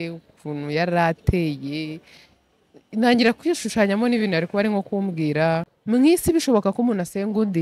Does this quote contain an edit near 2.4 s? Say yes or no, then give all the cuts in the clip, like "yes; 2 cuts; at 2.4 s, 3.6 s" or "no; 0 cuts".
no; 1 cut; at 5.7 s